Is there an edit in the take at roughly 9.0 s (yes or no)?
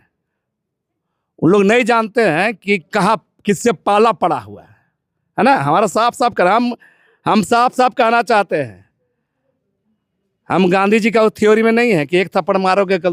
no